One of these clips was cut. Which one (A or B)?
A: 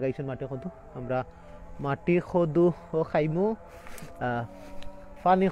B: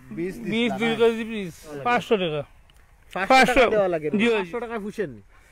B